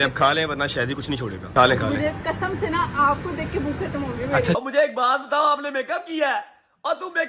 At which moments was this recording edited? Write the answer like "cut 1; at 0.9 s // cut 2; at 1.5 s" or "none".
cut 1; at 1.5 s // cut 2; at 4.4 s